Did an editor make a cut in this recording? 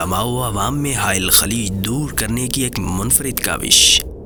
no; 0 cuts

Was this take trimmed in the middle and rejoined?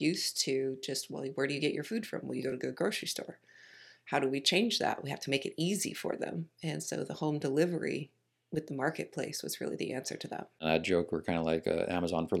yes; 1 cut; at 10.6 s

